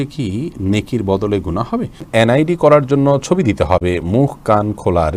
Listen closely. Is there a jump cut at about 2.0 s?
yes; 1 cut; at 2.0 s

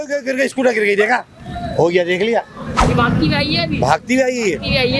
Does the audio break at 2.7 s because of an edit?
yes; 1 cut; at 2.7 s

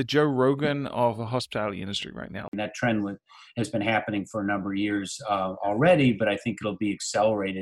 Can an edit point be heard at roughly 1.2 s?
no; 1 cut; at 2.5 s

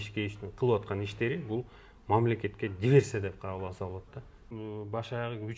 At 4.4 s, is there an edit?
yes; 1 cut; at 4.4 s

